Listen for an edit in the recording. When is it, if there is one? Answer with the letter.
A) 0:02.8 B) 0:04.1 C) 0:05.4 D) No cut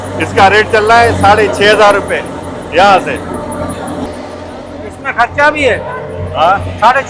B